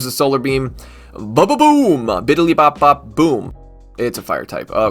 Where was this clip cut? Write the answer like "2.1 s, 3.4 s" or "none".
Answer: 3.6 s